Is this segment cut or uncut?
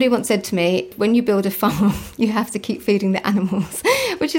cut